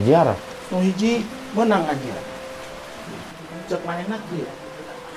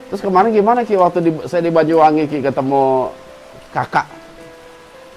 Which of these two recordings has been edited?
first; 1 cut; at 3.4 s

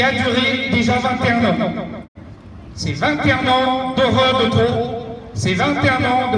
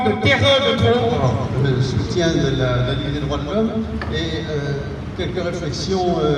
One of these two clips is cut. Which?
second; 1 cut; at 1.2 s

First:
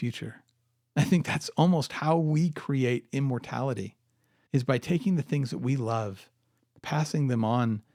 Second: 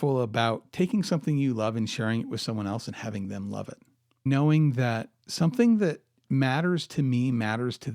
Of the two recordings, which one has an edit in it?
second; 1 cut; at 4.3 s

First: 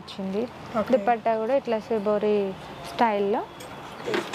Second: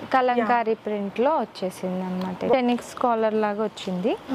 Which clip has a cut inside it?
second; 1 cut; at 2.2 s

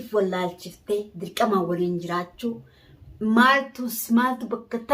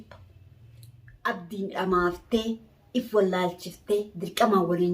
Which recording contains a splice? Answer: second; 1 cut; at 1.3 s

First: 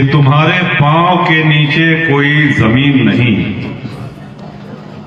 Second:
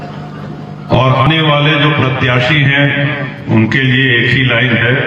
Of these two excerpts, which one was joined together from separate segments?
second; 1 cut; at 1.2 s

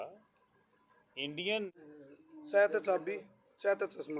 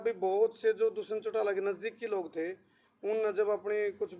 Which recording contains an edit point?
first; 1 cut; at 1.7 s

